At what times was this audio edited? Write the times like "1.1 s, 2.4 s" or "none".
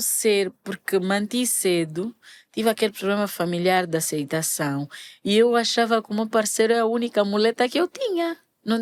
none